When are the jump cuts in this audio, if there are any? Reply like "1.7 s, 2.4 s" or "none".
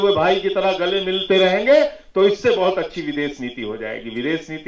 none